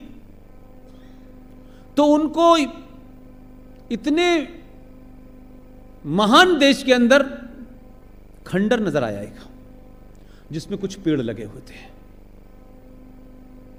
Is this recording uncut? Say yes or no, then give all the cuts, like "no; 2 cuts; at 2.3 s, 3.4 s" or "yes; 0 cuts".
yes; 0 cuts